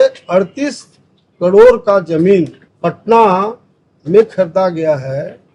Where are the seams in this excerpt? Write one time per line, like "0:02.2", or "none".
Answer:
0:02.6